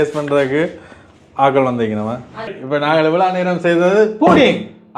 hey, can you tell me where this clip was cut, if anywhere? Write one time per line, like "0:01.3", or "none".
0:02.6